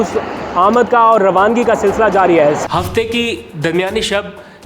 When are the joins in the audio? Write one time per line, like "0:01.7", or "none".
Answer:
0:02.6